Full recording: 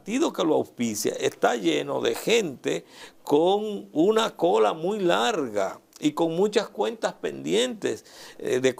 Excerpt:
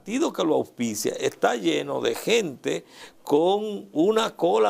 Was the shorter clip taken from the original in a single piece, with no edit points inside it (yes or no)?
yes